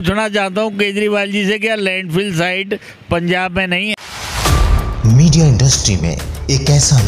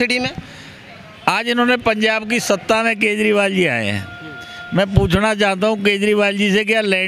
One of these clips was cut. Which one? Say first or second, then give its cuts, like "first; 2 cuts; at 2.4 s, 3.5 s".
first; 1 cut; at 4.0 s